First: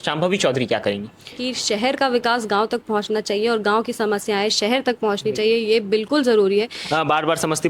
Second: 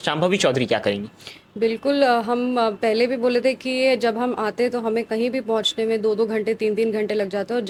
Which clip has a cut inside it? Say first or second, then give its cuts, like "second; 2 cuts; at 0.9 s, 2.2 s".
first; 2 cuts; at 1.4 s, 6.8 s